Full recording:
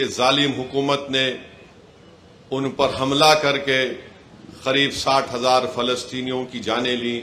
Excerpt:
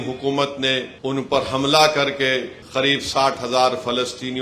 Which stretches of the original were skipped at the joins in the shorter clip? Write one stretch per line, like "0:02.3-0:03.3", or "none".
0:01.4-0:02.4
0:04.0-0:04.5

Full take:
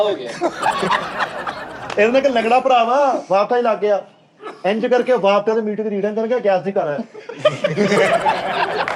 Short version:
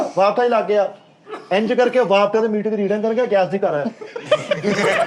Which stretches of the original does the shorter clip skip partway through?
none

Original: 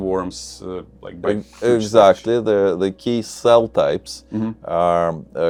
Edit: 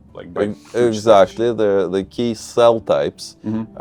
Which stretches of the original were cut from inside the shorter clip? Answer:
none

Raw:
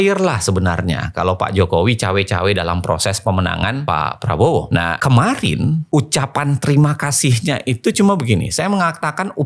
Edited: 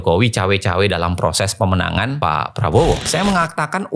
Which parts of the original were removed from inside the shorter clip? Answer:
0:04.7-0:08.5

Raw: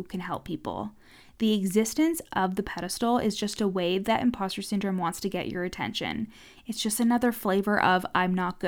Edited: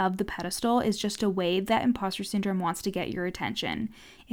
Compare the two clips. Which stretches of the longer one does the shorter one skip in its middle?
none

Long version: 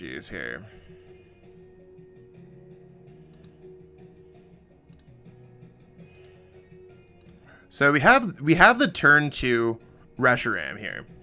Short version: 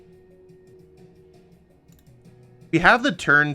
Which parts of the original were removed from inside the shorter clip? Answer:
0:02.2-0:03.7
0:05.6-0:08.4

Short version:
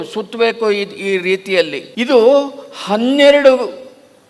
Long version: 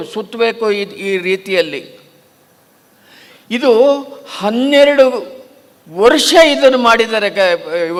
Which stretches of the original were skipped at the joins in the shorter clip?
0:01.8-0:03.3

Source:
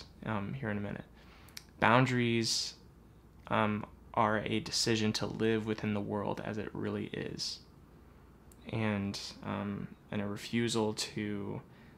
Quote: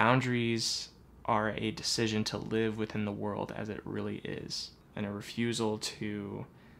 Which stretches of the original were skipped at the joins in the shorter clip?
0:02.9-0:04.0
0:07.7-0:09.9

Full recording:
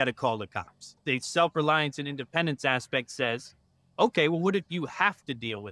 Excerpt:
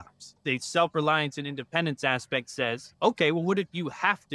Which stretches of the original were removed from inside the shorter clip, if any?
0:03.5-0:03.8

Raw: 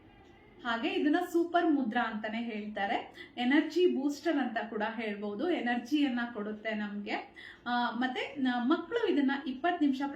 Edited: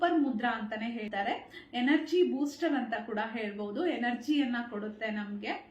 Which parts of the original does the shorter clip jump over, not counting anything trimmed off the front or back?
0:02.6-0:02.7

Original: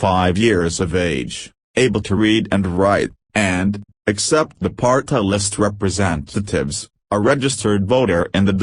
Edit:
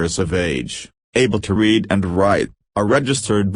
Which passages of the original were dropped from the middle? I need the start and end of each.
0:03.2-0:06.9

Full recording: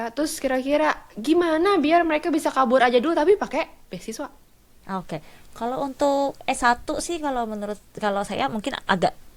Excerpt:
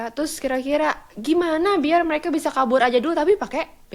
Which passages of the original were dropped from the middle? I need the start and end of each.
none

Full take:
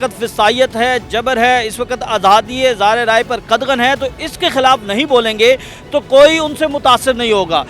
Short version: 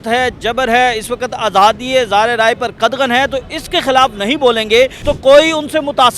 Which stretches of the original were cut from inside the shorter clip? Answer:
0:05.7-0:05.9

